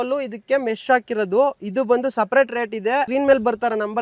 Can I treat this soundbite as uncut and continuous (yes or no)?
no